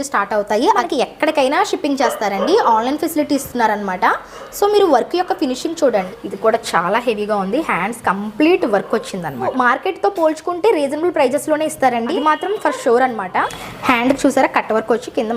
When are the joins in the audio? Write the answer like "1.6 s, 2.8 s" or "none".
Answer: 0.8 s, 6.1 s, 9.5 s, 12.1 s, 13.6 s